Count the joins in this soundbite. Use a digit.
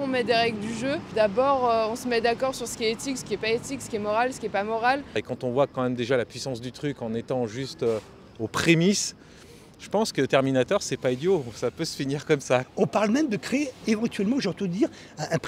3